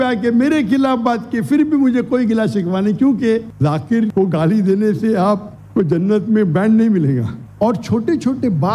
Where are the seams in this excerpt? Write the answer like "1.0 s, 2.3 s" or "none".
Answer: 3.5 s, 7.4 s